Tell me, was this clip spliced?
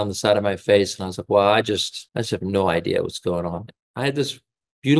yes; 2 cuts; at 2.0 s, 3.7 s

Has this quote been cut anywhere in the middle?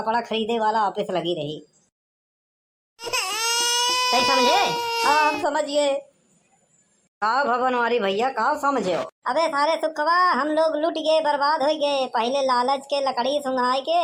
no; 0 cuts

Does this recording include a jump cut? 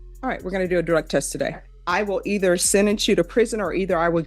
yes; 1 cut; at 1.7 s

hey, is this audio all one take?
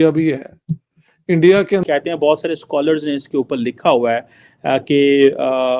no; 1 cut; at 1.8 s

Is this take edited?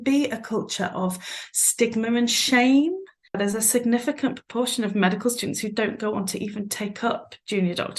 yes; 1 cut; at 3.4 s

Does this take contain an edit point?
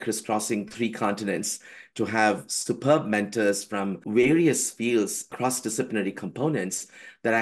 yes; 2 cuts; at 4.0 s, 5.3 s

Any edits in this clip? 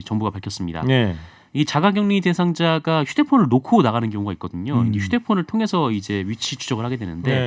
no; 0 cuts

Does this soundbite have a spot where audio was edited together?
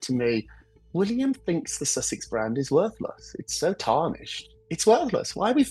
no; 0 cuts

